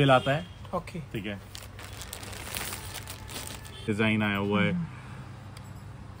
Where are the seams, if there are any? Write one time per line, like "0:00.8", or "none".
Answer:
0:03.9